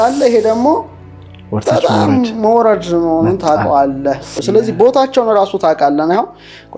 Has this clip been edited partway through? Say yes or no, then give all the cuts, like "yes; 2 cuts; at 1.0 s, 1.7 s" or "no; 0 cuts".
no; 0 cuts